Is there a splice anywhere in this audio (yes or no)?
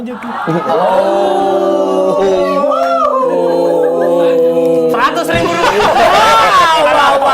no